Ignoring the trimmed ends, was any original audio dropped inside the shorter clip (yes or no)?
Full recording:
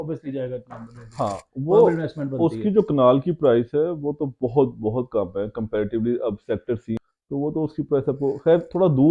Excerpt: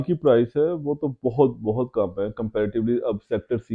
no